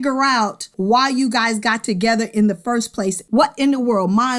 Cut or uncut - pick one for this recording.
cut